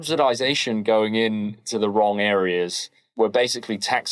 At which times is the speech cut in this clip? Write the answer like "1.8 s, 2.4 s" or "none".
3.1 s